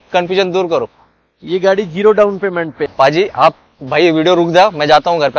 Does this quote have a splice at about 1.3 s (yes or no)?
no